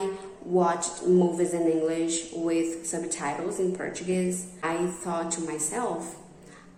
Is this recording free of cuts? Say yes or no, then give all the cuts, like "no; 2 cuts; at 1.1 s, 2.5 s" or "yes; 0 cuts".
yes; 0 cuts